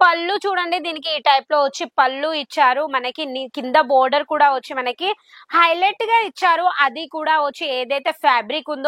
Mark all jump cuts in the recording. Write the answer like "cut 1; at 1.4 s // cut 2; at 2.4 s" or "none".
none